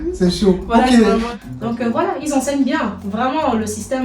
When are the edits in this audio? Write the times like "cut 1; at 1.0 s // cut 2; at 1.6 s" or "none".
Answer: cut 1; at 1.3 s